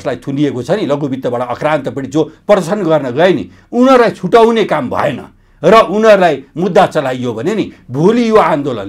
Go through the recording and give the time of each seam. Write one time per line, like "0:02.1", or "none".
none